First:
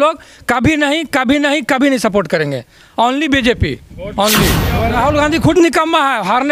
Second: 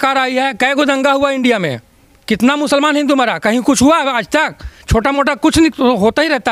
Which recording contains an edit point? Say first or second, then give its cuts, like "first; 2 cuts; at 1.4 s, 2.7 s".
first; 1 cut; at 5.0 s